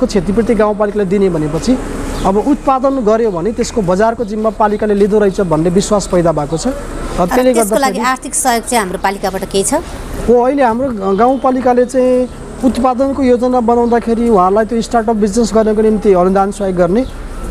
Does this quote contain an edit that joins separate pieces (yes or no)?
no